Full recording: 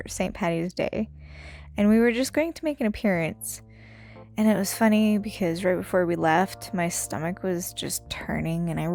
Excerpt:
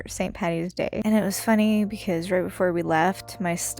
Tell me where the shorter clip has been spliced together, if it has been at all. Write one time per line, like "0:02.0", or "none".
0:01.0